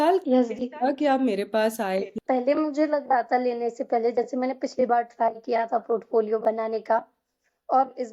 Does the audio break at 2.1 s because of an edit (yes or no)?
yes